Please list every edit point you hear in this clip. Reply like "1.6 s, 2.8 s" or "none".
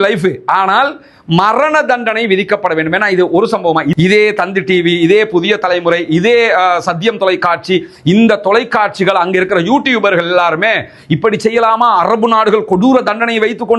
3.8 s